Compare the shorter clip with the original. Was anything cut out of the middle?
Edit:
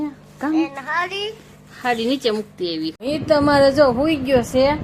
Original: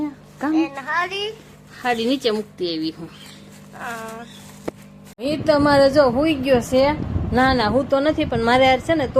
yes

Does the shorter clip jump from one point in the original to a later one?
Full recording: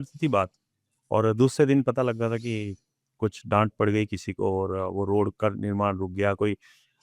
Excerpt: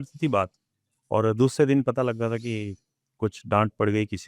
no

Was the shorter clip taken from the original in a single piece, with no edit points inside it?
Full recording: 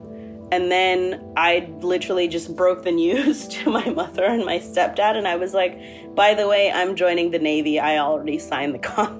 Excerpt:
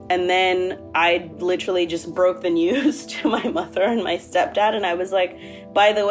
yes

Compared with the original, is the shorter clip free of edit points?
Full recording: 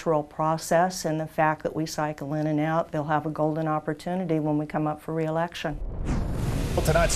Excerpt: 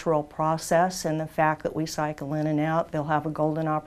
yes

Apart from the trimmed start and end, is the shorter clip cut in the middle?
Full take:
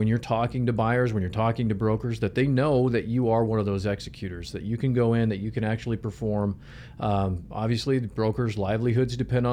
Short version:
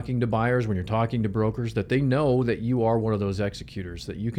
no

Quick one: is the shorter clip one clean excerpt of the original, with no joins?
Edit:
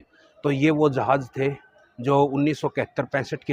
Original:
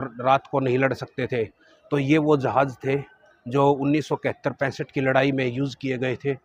yes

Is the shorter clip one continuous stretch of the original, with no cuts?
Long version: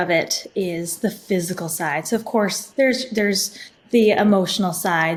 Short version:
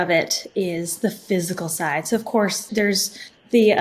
no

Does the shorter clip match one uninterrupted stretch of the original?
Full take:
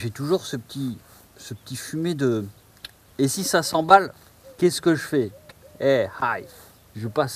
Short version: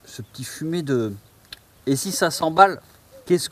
yes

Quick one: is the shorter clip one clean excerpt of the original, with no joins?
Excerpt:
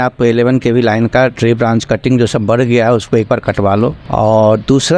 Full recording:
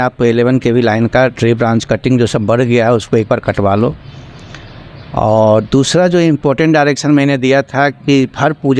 no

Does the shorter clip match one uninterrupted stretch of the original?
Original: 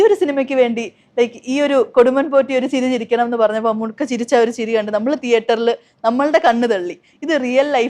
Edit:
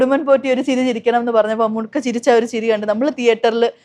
yes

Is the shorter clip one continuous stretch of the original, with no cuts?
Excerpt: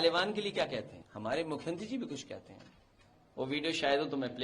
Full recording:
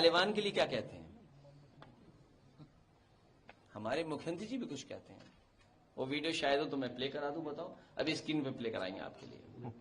no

